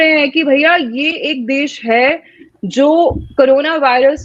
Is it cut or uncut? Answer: uncut